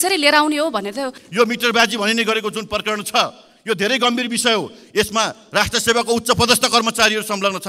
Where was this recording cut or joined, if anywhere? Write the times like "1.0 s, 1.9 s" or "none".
1.2 s